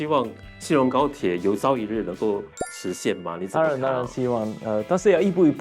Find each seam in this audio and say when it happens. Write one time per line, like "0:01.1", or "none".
none